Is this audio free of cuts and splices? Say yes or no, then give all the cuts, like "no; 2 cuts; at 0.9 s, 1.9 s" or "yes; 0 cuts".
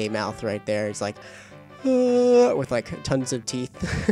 yes; 0 cuts